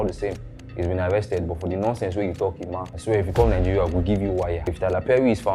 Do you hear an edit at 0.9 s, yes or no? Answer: no